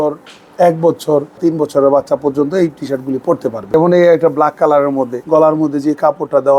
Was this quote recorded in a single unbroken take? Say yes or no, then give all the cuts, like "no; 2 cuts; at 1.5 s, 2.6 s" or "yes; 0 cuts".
no; 3 cuts; at 1.4 s, 3.6 s, 5.2 s